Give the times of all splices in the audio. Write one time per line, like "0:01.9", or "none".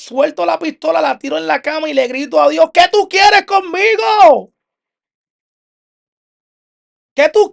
none

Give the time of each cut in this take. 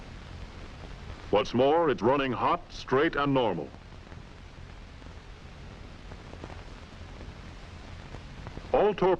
0:04.9

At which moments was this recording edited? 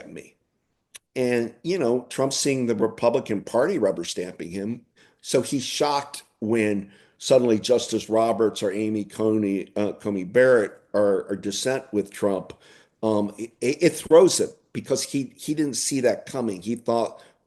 none

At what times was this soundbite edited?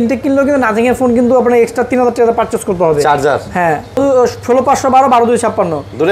0:04.0

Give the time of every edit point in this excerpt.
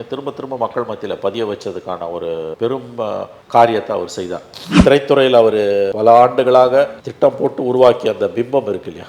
0:04.8

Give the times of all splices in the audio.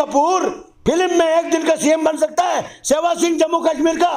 none

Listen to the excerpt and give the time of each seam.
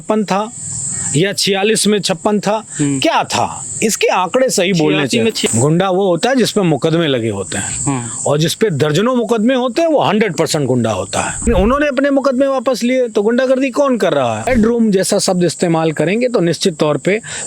0:05.4
0:11.5
0:14.5

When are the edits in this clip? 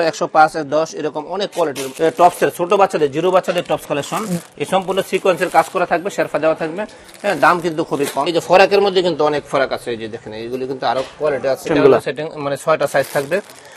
0:01.8
0:08.4
0:11.7

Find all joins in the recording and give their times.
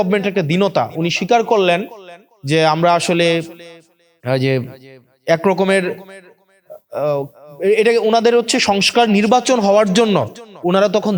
none

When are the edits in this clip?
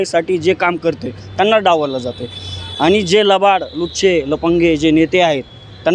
none

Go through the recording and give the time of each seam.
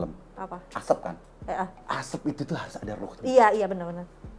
0:01.8

